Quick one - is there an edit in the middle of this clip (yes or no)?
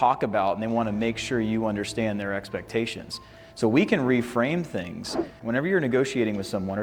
yes